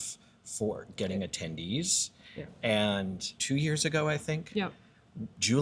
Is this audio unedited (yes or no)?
no